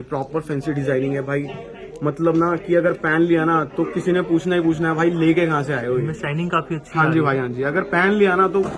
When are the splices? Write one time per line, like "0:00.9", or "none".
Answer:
none

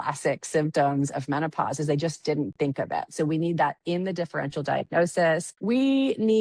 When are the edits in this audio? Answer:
0:05.5

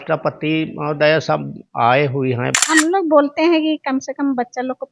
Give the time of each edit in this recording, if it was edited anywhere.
0:02.5

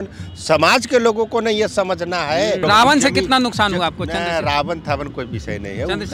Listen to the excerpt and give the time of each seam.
0:02.6

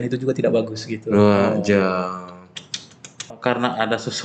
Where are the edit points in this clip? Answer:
0:03.4

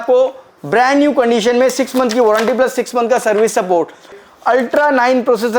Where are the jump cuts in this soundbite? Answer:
0:04.2

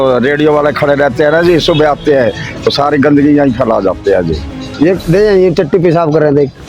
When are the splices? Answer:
0:04.6

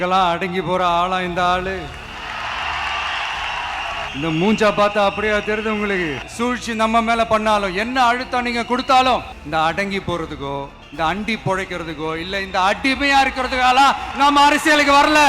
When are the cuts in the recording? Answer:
0:04.1
0:06.2
0:09.4
0:10.8

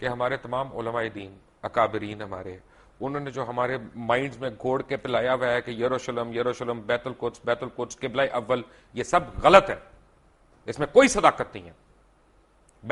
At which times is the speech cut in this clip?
none

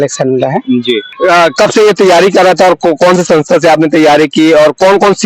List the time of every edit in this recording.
0:01.1

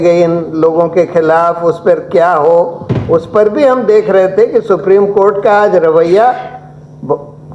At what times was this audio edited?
none

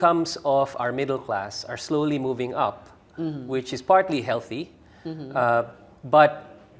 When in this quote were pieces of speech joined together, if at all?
0:05.8

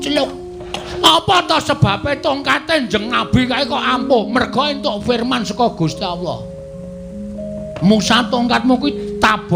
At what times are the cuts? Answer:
0:00.9

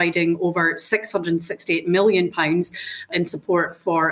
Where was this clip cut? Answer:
none

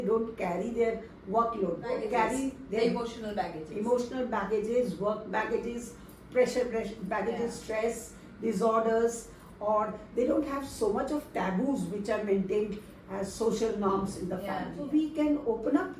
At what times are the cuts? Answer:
0:02.0
0:14.8

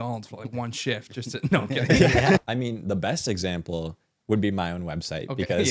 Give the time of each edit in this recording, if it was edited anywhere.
0:02.4

